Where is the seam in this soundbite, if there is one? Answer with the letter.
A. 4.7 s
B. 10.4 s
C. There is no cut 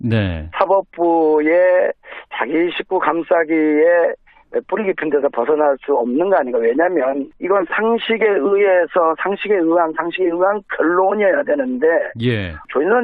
B